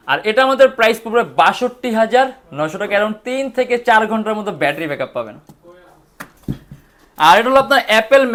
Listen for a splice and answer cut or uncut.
uncut